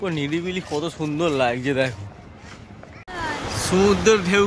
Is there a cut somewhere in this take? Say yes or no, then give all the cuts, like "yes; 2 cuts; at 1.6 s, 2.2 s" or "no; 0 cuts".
yes; 1 cut; at 3.1 s